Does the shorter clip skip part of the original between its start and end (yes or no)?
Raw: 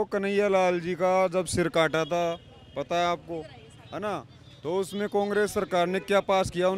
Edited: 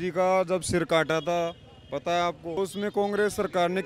yes